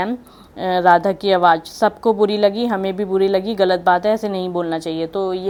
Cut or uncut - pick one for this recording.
uncut